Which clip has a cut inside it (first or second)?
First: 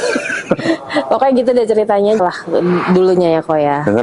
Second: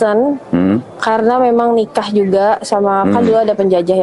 first